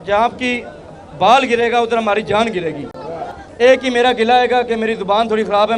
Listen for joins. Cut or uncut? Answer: cut